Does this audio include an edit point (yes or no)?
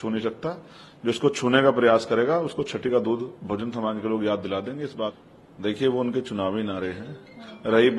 no